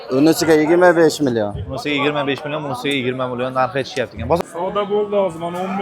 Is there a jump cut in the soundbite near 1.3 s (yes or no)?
no